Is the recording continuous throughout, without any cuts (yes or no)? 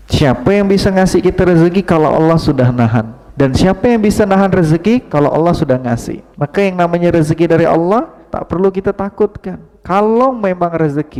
yes